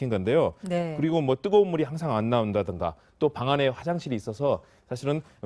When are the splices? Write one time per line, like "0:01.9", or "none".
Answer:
0:03.6